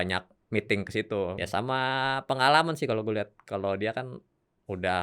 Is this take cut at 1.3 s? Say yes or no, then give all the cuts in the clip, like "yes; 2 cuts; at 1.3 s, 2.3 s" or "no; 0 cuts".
yes; 1 cut; at 1.3 s